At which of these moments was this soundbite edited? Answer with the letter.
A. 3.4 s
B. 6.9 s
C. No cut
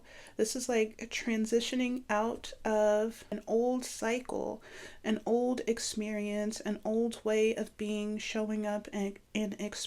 A